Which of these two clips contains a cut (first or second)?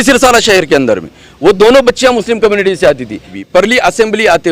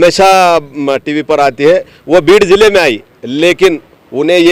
first